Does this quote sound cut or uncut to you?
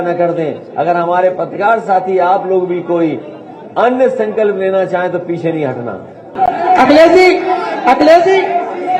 cut